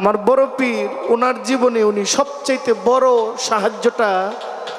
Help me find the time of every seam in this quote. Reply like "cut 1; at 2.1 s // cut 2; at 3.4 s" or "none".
none